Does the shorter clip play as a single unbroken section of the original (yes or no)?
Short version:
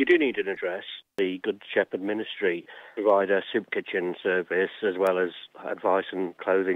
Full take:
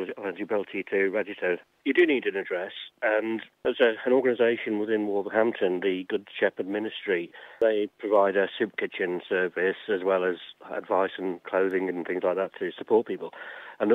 no